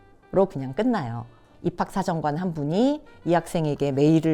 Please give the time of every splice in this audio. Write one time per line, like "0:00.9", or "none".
0:01.5